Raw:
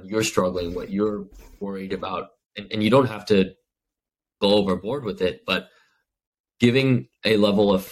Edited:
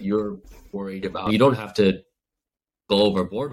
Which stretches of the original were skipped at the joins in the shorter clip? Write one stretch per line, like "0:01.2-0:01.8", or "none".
0:02.1-0:02.8